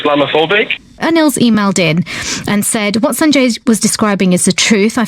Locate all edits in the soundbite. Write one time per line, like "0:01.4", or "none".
0:00.9